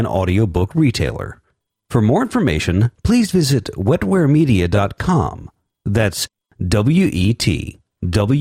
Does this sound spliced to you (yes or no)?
no